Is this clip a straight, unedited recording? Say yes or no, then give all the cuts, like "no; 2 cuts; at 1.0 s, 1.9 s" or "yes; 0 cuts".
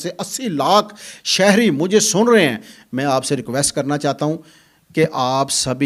yes; 0 cuts